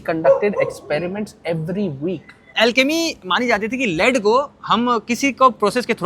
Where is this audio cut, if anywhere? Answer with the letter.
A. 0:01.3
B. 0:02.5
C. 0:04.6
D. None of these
B